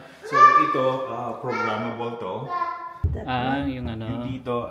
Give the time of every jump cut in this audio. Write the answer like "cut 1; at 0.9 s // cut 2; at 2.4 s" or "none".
cut 1; at 3.1 s